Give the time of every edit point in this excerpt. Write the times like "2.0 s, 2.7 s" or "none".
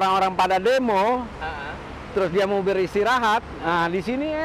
none